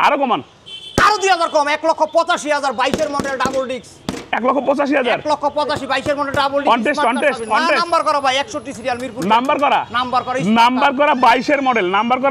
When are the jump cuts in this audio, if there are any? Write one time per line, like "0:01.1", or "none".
none